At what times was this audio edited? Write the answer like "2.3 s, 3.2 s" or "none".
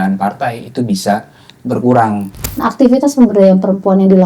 2.4 s